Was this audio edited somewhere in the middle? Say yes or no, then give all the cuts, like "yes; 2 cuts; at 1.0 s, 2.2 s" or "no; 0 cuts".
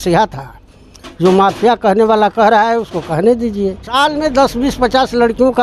yes; 1 cut; at 4.0 s